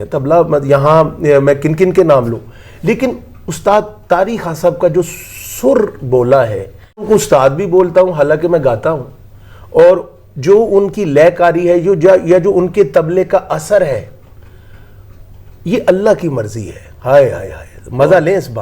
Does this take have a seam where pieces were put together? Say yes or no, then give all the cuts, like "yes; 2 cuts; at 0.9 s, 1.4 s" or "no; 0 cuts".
yes; 1 cut; at 7.0 s